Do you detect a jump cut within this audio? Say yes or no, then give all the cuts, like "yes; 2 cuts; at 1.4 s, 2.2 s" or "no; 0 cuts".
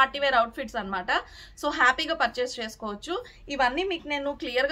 no; 0 cuts